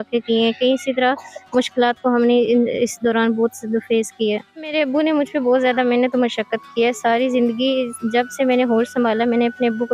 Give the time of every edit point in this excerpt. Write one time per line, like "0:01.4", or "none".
0:04.7